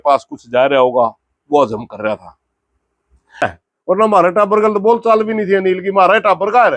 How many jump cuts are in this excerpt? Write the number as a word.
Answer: one